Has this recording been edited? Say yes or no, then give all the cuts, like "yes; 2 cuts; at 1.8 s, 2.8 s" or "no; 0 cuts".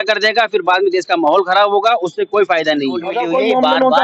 yes; 1 cut; at 3.1 s